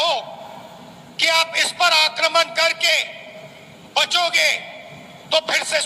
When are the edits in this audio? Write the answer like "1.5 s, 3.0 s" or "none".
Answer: none